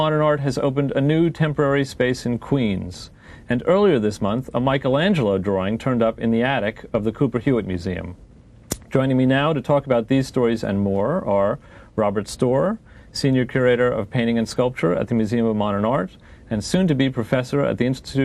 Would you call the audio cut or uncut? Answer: uncut